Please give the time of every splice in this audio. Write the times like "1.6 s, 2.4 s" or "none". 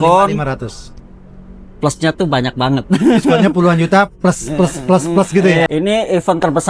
5.7 s